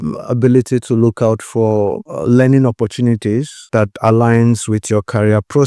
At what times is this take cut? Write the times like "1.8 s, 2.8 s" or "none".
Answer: 2.1 s, 3.6 s